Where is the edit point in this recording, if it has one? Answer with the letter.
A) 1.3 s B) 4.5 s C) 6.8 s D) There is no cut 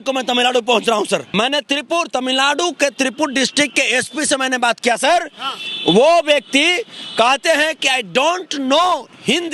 A